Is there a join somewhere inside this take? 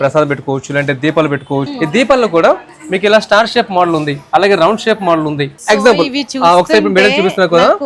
yes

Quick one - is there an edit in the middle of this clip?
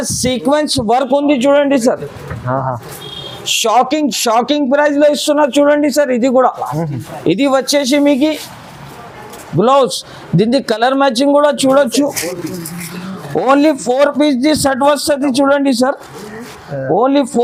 no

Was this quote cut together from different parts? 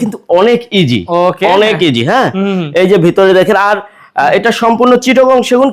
no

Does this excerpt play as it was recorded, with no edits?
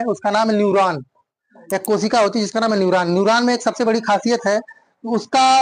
yes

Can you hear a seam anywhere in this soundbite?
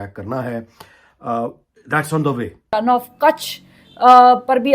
yes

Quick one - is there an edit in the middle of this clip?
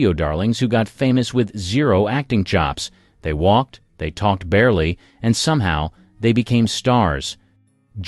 no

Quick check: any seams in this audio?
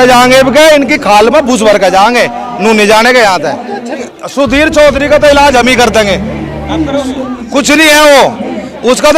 yes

